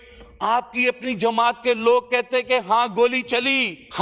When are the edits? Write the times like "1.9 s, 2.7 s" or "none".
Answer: none